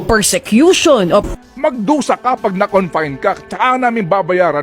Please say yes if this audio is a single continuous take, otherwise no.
no